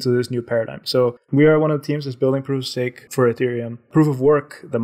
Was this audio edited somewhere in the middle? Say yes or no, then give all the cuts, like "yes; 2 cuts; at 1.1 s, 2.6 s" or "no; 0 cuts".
yes; 3 cuts; at 1.2 s, 3.0 s, 3.9 s